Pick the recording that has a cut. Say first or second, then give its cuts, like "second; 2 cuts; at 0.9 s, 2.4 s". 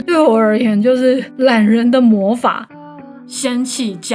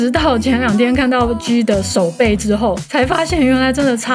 first; 1 cut; at 2.7 s